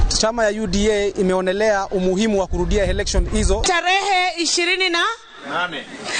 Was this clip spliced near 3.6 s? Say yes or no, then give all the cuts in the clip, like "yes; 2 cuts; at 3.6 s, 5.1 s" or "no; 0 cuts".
yes; 1 cut; at 3.6 s